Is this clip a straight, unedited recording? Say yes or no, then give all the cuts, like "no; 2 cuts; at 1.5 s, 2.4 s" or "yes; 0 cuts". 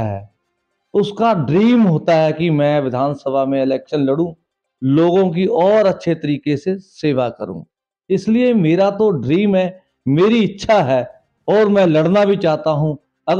yes; 0 cuts